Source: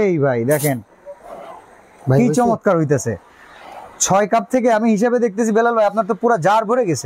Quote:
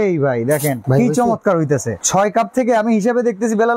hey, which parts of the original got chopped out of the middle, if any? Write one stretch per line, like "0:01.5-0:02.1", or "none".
0:00.8-0:02.0
0:03.2-0:03.9